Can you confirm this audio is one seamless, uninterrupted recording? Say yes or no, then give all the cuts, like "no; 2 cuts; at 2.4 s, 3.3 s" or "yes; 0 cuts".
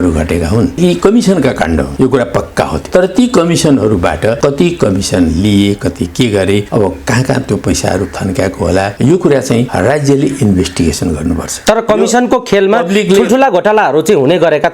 no; 8 cuts; at 0.8 s, 1.9 s, 2.8 s, 4.4 s, 6.7 s, 8.9 s, 9.7 s, 11.5 s